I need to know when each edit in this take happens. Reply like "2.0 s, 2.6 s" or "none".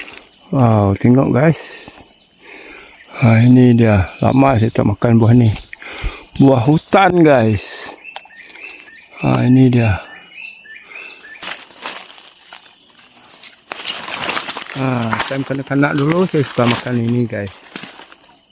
11.4 s